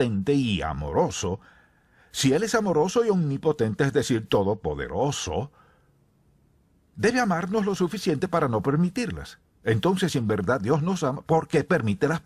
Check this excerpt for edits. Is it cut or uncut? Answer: cut